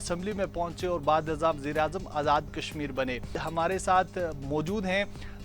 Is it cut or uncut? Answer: cut